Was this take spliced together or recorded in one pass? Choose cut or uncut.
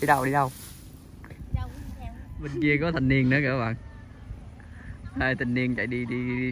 cut